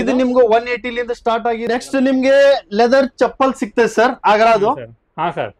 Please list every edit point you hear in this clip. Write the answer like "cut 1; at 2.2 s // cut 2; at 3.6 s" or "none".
cut 1; at 1.6 s